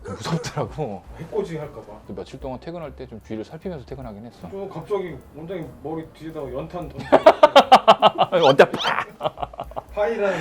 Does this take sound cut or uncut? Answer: uncut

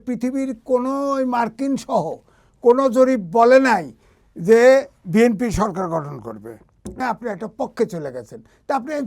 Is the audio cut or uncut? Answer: cut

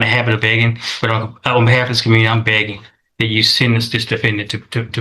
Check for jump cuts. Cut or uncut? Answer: uncut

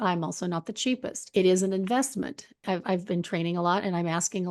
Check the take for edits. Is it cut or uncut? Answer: cut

